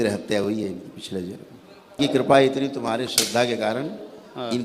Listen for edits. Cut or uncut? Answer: cut